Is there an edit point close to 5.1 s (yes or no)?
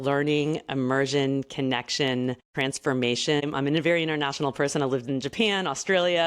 no